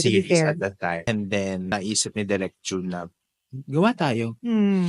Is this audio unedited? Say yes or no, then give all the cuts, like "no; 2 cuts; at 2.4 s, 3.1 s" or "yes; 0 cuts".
no; 2 cuts; at 1.0 s, 1.7 s